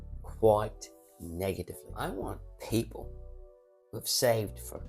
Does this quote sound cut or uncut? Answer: cut